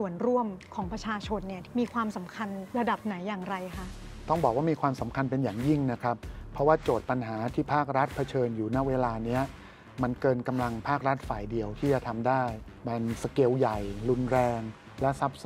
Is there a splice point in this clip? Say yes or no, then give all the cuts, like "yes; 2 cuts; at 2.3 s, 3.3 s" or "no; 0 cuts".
yes; 3 cuts; at 1.5 s, 2.6 s, 12.6 s